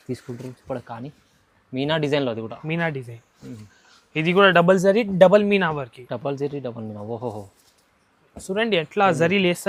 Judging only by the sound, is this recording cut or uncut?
uncut